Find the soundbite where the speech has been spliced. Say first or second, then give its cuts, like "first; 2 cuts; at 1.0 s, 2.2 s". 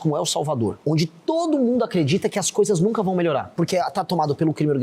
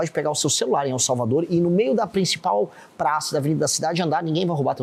first; 2 cuts; at 0.8 s, 3.5 s